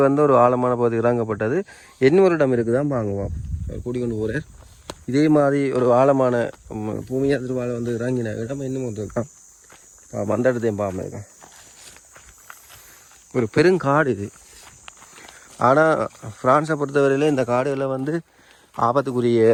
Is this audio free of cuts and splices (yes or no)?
yes